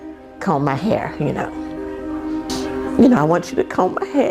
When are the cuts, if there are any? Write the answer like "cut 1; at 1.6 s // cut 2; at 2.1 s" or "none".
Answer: cut 1; at 2.5 s